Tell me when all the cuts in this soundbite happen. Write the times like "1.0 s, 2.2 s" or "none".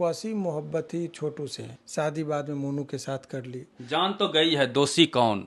1.7 s, 3.7 s